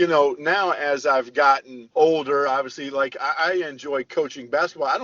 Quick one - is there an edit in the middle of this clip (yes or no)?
yes